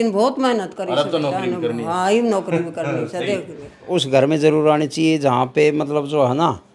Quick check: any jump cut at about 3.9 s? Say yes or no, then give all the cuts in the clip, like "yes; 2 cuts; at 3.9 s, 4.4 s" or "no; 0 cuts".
yes; 1 cut; at 3.9 s